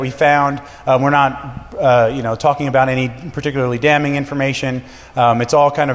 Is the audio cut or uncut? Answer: uncut